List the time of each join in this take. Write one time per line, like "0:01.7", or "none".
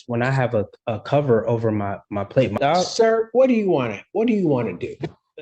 0:02.6